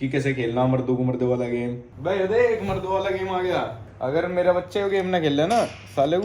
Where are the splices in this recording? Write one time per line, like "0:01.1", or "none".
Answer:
0:01.9
0:03.8